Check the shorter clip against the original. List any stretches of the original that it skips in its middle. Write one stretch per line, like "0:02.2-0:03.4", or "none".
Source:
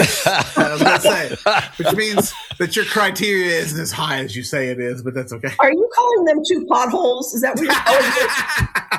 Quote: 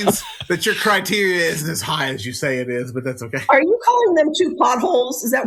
none